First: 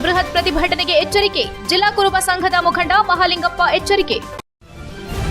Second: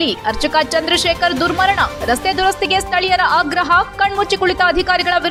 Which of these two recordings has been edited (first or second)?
first